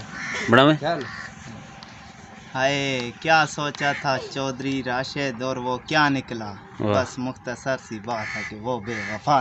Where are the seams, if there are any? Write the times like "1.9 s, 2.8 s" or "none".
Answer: none